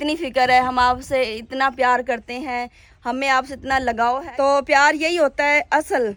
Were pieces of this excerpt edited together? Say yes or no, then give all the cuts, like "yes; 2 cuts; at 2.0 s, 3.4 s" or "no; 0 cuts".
no; 0 cuts